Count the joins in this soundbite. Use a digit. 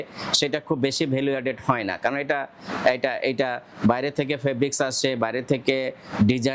0